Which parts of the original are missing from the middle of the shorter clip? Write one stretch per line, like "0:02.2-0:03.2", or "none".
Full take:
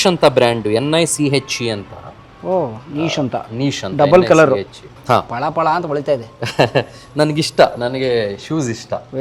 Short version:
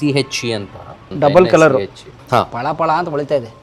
0:02.2-0:03.8